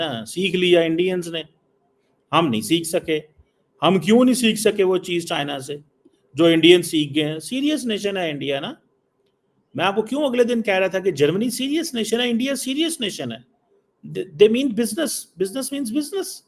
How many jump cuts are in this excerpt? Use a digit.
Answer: 0